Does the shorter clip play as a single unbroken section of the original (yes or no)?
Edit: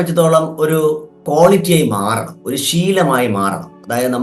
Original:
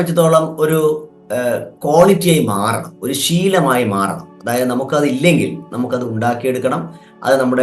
no